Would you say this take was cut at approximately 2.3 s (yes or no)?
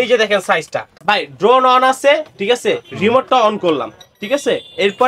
no